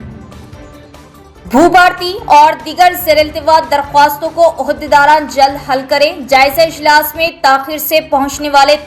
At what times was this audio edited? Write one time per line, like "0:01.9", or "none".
0:01.0